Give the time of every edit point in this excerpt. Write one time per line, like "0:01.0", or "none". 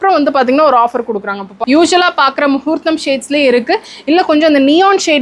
0:01.5